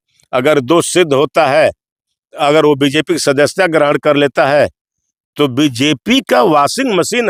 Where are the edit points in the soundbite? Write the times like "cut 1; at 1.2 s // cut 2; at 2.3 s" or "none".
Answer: none